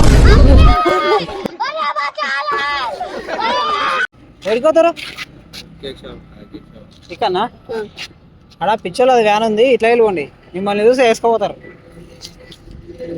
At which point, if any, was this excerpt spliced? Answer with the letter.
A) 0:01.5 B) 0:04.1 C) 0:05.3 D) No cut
B